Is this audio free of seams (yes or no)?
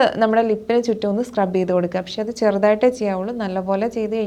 yes